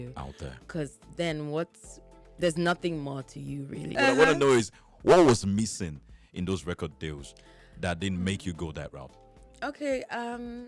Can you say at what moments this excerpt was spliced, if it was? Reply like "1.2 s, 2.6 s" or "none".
3.9 s